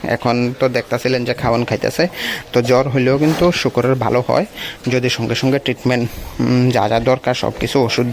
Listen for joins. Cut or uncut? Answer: uncut